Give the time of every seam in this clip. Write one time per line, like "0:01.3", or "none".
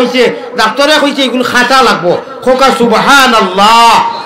none